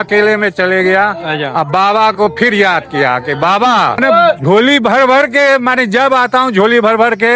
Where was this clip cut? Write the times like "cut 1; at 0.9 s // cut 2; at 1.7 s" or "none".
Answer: cut 1; at 4.0 s